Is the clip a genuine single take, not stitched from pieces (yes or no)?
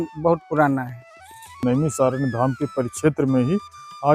no